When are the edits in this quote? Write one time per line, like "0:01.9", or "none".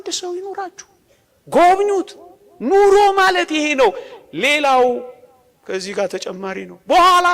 none